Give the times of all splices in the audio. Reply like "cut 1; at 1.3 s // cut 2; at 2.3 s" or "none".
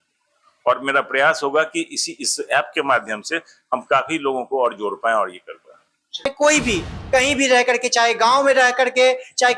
cut 1; at 6.3 s